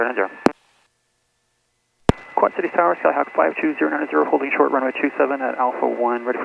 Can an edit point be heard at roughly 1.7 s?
yes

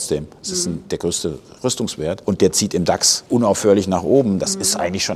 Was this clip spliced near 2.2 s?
yes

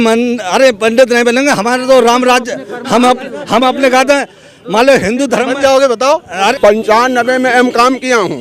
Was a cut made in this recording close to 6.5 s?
yes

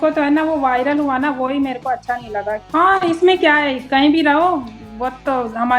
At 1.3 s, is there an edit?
no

